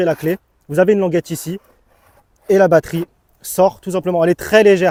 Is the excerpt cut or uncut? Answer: uncut